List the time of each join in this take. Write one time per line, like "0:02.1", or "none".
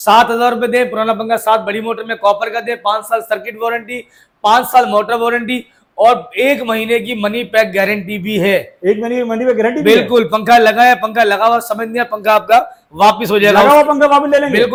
none